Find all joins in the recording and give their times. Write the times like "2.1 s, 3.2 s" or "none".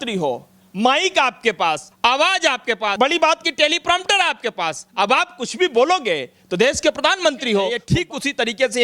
1.9 s, 2.9 s, 7.8 s